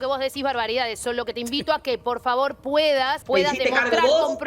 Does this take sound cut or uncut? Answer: cut